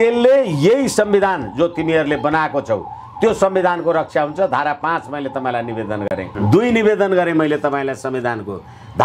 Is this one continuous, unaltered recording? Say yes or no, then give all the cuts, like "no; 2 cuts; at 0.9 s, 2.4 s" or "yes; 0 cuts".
yes; 0 cuts